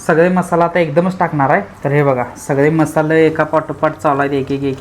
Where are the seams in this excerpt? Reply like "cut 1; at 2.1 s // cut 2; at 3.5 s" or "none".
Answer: cut 1; at 1.7 s